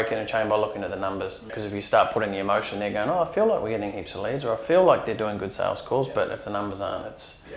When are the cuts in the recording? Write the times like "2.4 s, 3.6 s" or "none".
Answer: 1.5 s